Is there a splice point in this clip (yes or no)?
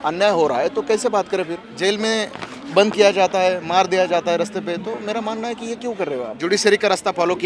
yes